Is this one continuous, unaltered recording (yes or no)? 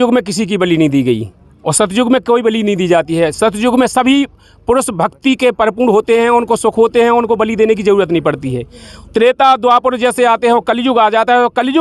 yes